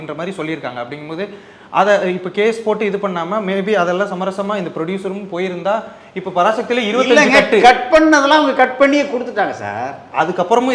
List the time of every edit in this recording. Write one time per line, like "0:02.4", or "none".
none